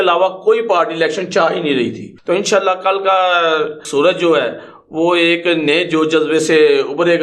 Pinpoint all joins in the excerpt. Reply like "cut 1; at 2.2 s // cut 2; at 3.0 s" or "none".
cut 1; at 2.1 s // cut 2; at 3.8 s